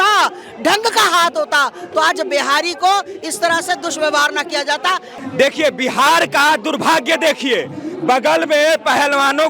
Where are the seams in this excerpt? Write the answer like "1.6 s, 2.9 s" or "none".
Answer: 5.1 s